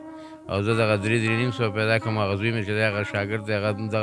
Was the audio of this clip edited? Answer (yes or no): no